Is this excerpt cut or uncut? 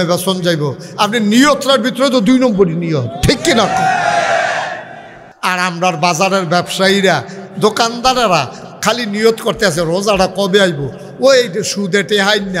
cut